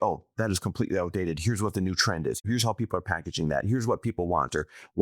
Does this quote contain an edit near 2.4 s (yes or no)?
yes